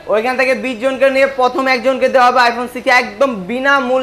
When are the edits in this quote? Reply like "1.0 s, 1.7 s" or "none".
none

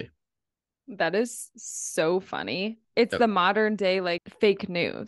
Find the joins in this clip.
2.8 s, 4.3 s

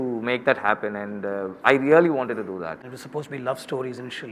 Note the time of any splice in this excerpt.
2.9 s

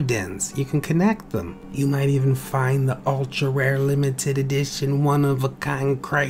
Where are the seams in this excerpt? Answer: 1.6 s

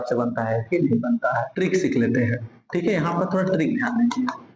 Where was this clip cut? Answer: 1.5 s

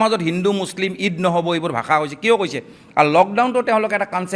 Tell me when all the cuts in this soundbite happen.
2.8 s

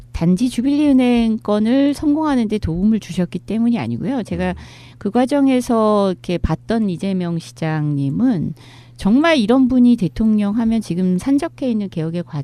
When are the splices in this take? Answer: 10.9 s

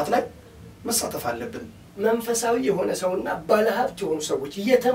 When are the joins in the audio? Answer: 1.8 s

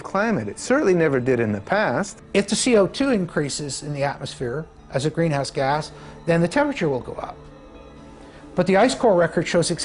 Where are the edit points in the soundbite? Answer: 2.2 s

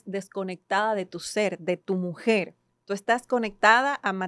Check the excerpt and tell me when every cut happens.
none

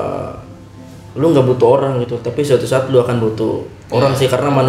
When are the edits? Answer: none

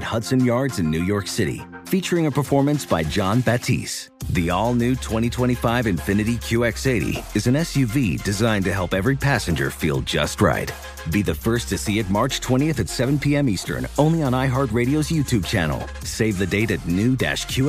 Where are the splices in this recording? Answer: none

